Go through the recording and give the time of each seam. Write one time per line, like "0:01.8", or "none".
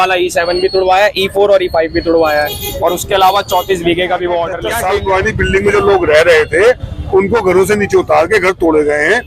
0:04.6

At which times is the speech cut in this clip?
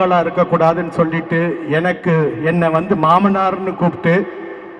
none

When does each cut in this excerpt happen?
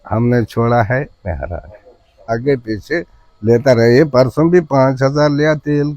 0:02.3

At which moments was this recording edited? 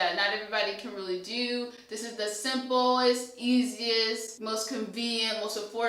0:04.3

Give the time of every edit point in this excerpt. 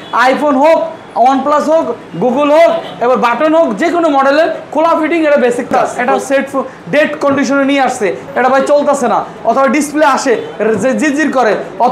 0:05.7
0:08.3

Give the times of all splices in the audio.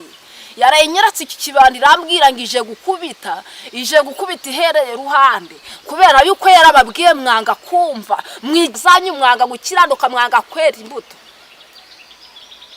0:08.8

